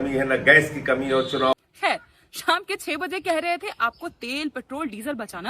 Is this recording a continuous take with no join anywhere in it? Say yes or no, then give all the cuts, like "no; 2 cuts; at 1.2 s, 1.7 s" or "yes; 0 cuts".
no; 1 cut; at 1.5 s